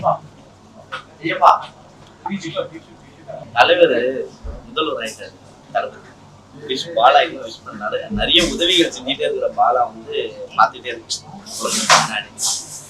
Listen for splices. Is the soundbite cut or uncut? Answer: cut